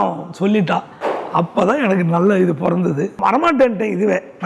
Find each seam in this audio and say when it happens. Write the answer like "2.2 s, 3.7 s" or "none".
3.2 s